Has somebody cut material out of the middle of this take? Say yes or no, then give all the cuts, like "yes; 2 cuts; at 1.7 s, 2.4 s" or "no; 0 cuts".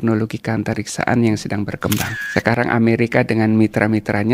yes; 1 cut; at 2.1 s